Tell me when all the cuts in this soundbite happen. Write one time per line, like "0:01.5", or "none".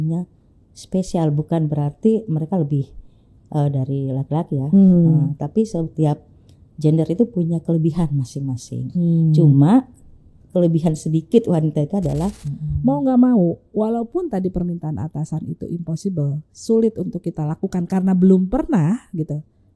0:12.5